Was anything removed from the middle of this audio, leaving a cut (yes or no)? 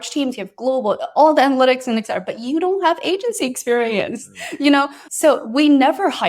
yes